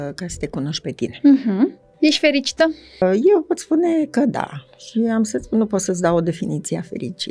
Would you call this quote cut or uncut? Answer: cut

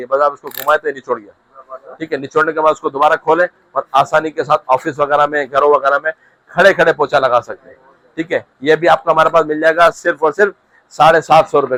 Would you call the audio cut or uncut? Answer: uncut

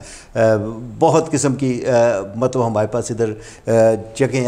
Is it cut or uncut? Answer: uncut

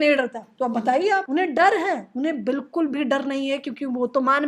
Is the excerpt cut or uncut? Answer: cut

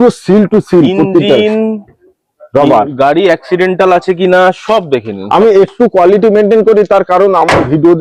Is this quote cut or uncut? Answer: uncut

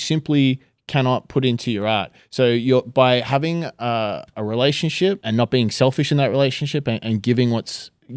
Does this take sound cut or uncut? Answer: cut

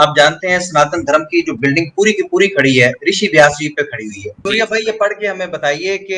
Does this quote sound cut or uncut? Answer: cut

